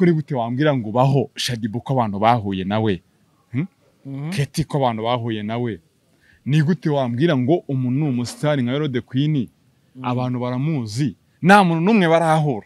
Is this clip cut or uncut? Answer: uncut